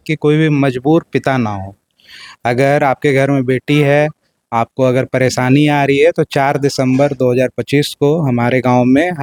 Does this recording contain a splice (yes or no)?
no